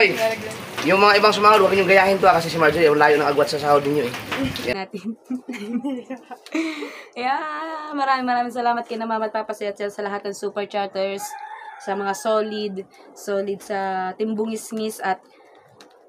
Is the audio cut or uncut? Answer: cut